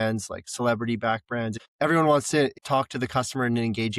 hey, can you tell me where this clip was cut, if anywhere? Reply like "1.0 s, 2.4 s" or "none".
1.6 s, 2.6 s

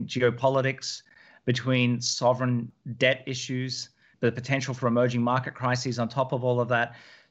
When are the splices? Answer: 2.8 s, 4.1 s

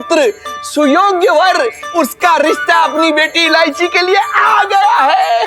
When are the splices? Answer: 1.8 s

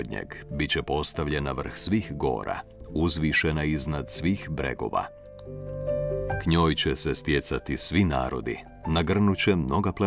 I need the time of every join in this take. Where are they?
none

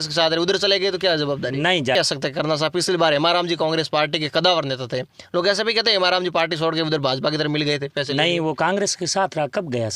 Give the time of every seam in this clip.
2.0 s

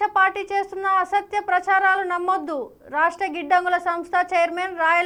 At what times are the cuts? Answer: none

